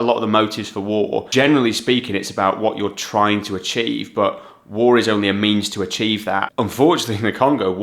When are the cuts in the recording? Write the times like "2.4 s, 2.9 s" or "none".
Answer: 1.3 s, 6.5 s